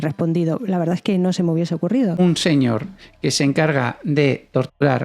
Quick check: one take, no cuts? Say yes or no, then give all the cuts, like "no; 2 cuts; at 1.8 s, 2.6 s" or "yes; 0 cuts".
no; 1 cut; at 2.2 s